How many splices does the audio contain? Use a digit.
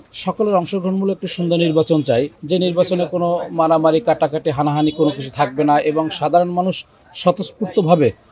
0